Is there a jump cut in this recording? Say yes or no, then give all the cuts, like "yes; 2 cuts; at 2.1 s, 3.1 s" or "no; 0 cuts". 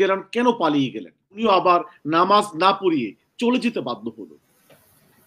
yes; 1 cut; at 1.4 s